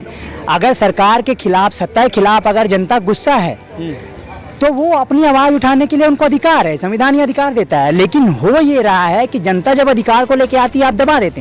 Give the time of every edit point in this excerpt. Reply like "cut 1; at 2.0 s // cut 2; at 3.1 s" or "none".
none